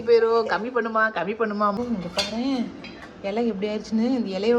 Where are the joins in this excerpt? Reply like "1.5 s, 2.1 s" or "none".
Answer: 1.8 s